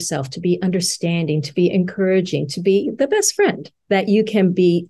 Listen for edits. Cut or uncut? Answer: uncut